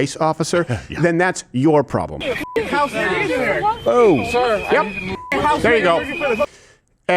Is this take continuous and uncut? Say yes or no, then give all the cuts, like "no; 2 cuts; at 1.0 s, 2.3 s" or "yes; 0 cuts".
no; 1 cut; at 2.1 s